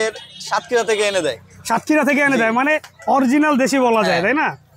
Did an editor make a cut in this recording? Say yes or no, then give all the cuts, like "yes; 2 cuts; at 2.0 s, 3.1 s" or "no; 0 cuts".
no; 0 cuts